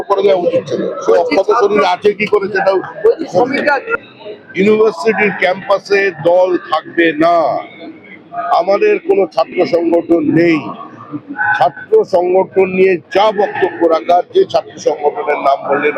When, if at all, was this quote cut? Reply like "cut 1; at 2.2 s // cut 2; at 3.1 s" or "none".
cut 1; at 3.9 s